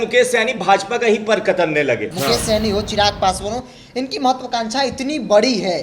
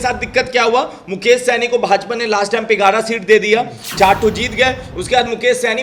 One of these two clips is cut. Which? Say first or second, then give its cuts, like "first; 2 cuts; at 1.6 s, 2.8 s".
first; 1 cut; at 2.1 s